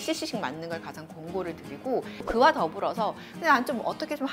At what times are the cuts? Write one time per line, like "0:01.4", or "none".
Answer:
0:02.2

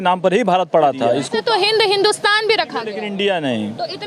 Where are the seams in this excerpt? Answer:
0:01.2
0:03.0

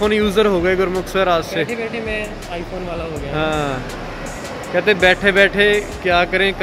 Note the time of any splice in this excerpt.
none

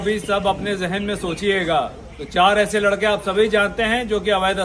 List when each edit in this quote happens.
0:02.1

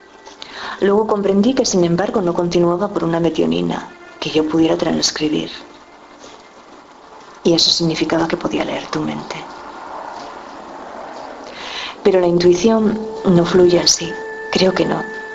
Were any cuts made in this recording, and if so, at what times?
none

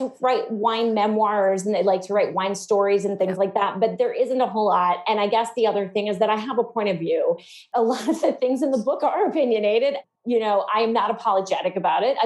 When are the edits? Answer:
none

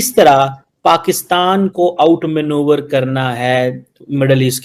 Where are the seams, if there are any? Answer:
none

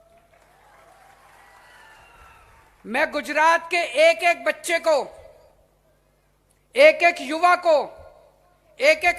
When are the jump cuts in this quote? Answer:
0:02.7

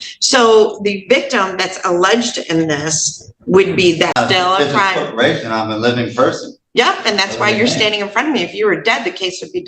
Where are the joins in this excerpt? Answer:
0:04.1

